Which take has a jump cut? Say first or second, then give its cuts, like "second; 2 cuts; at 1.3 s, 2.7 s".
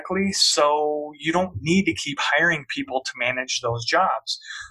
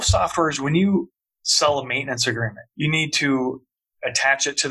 second; 1 cut; at 2.6 s